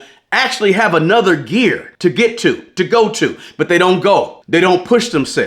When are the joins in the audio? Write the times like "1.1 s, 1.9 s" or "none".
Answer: 1.9 s, 4.4 s